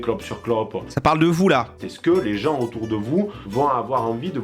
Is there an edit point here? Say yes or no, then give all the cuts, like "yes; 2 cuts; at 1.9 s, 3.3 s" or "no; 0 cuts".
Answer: yes; 2 cuts; at 0.9 s, 1.8 s